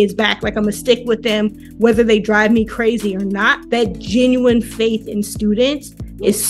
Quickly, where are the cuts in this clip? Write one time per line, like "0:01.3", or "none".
0:03.5